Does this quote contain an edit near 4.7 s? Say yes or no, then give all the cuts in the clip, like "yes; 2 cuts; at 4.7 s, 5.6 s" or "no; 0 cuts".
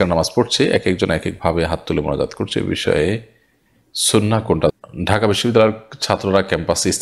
yes; 1 cut; at 4.7 s